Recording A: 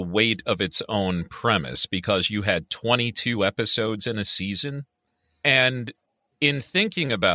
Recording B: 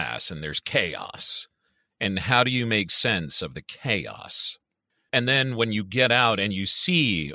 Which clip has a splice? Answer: B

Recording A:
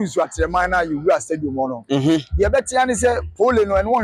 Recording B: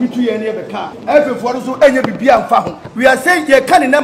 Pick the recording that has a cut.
B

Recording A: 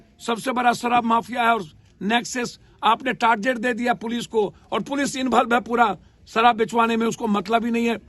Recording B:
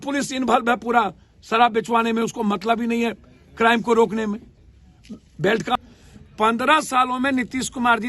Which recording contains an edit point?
B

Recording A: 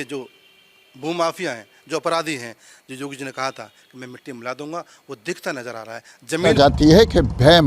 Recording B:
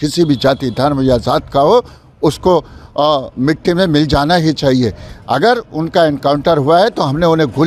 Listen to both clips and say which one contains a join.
A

